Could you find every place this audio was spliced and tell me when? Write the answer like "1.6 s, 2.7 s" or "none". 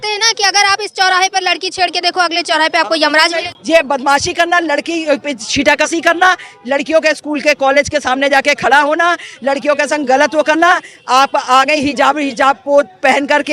3.5 s